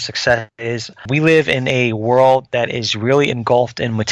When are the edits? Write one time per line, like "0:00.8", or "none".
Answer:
0:01.1